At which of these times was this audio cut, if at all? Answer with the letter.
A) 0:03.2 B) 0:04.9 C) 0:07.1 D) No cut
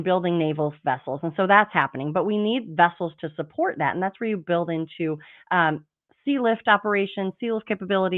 D